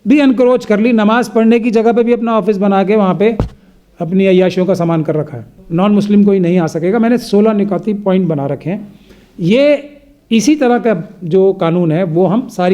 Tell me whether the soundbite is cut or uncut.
cut